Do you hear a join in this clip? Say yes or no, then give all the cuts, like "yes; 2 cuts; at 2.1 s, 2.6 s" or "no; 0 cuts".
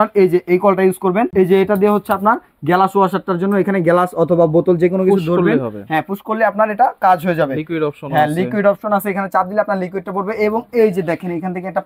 yes; 1 cut; at 1.3 s